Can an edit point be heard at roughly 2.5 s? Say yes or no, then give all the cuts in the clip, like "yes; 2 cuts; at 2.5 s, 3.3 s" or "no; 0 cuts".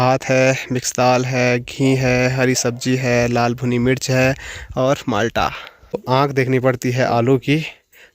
no; 1 cut; at 6.0 s